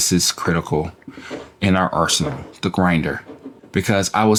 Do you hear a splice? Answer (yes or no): no